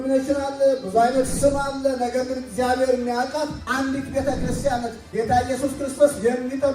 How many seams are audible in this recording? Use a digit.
2